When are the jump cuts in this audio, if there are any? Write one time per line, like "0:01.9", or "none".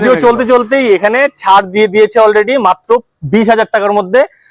none